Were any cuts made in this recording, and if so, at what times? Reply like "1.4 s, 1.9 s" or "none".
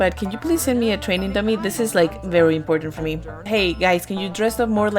3.3 s